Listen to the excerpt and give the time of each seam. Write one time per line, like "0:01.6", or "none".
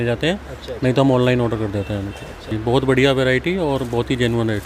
0:02.5